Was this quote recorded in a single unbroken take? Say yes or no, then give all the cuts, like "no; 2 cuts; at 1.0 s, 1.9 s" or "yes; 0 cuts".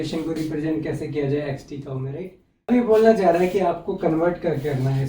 no; 1 cut; at 2.7 s